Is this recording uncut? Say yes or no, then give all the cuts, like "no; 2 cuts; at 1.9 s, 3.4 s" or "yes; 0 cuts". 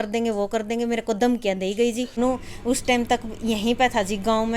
no; 1 cut; at 2.2 s